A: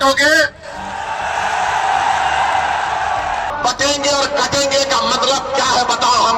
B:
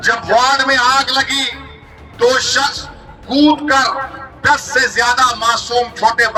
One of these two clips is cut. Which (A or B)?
A